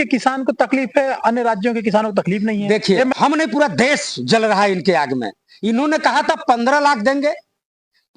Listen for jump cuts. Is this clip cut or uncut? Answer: cut